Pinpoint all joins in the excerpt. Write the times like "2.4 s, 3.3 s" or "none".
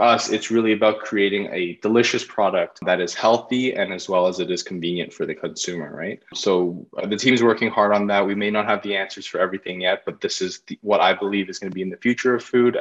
2.8 s, 6.3 s